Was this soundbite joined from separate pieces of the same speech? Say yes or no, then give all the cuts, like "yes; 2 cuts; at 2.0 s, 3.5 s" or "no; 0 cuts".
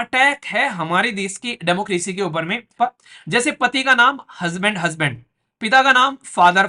yes; 1 cut; at 2.7 s